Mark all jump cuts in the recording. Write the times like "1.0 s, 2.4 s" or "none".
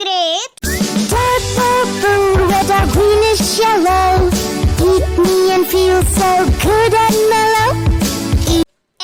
none